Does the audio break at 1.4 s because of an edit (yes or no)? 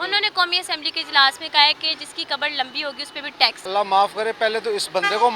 no